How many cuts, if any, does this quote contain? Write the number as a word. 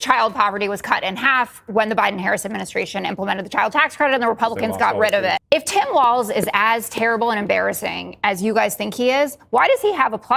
one